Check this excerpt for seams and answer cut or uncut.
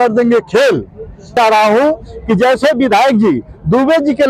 cut